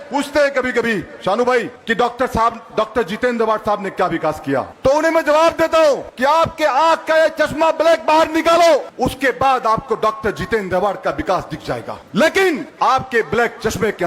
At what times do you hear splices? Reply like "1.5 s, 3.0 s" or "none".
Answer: 1.8 s, 4.7 s, 6.1 s, 8.9 s, 12.0 s, 12.7 s